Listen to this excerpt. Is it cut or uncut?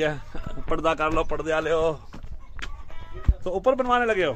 uncut